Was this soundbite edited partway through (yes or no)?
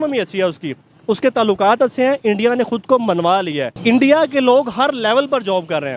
yes